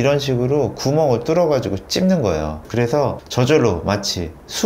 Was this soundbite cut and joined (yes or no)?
yes